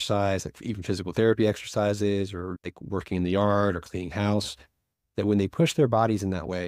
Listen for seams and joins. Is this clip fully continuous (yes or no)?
no